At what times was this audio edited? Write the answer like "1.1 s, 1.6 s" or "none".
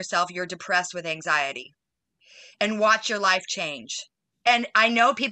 none

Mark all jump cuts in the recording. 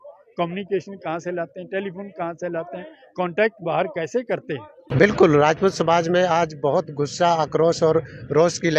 4.9 s

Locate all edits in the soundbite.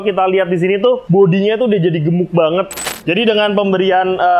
1.0 s, 2.8 s

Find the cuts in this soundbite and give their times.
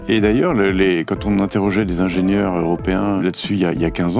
3.2 s

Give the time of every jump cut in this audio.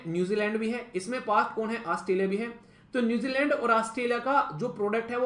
none

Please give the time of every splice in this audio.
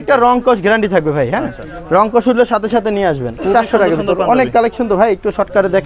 3.3 s

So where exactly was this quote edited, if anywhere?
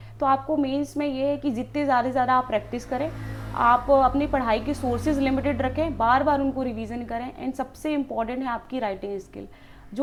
none

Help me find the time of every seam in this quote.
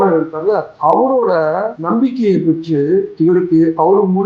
none

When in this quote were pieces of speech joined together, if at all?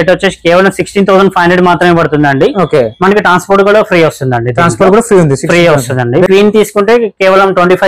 6.3 s

